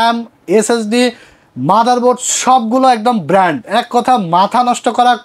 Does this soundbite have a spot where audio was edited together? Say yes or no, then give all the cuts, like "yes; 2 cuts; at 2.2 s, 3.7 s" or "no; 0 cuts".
no; 0 cuts